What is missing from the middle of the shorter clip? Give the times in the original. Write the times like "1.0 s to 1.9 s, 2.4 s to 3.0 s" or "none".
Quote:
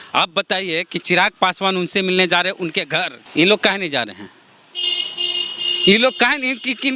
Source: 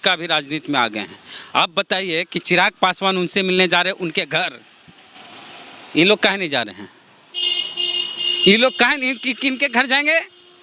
4.6 s to 5.8 s